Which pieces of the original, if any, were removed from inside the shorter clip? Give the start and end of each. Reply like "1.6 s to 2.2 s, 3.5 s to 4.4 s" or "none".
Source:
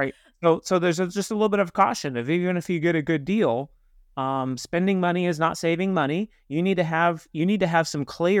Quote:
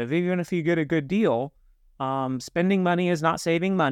none